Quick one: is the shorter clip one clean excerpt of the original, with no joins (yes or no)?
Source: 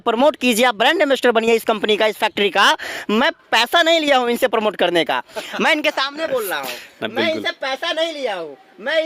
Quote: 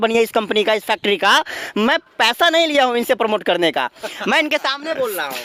yes